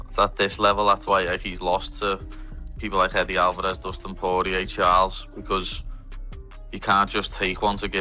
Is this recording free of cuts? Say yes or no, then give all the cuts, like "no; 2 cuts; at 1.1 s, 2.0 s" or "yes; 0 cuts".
yes; 0 cuts